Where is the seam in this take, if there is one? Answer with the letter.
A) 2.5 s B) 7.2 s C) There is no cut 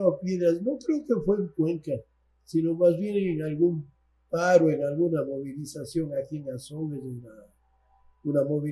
C